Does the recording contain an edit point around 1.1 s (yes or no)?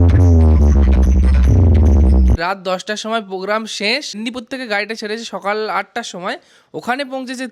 no